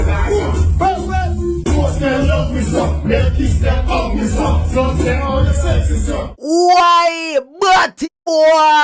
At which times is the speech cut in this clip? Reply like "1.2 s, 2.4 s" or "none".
none